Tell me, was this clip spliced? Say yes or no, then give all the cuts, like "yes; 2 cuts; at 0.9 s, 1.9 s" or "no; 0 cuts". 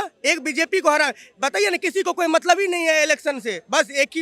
no; 0 cuts